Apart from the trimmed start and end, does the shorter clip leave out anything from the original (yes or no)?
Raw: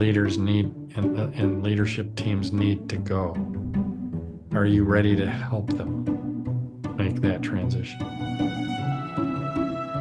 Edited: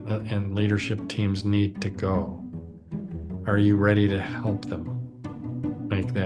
yes